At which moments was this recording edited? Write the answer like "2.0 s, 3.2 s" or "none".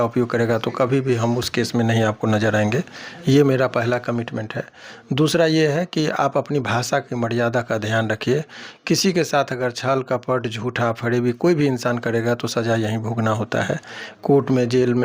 none